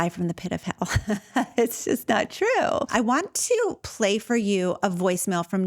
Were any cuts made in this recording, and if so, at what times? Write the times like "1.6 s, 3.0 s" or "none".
2.9 s